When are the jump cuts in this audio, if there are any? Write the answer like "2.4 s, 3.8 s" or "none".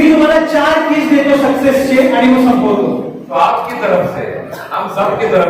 3.2 s

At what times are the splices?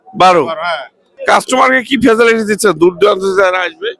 1.0 s

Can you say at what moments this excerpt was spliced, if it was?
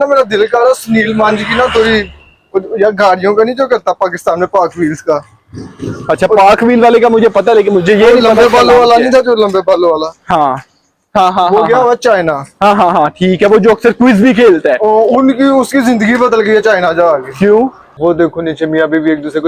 17.9 s

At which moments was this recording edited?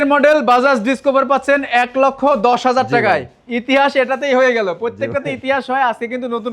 none

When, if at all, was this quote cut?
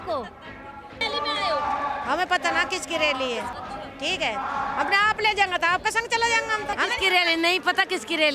1.0 s, 3.6 s, 6.7 s

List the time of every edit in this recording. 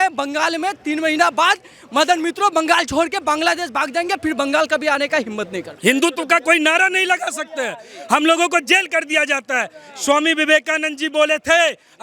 5.6 s

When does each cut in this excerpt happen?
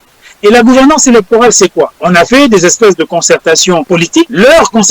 2.0 s, 4.0 s

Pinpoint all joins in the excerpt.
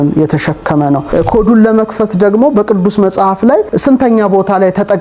1.1 s, 3.7 s

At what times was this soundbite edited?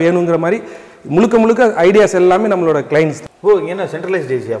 3.3 s

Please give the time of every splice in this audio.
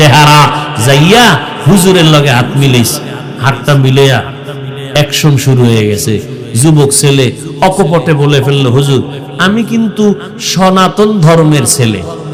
none

